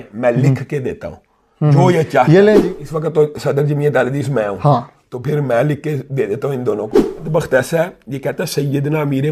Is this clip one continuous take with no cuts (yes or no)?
no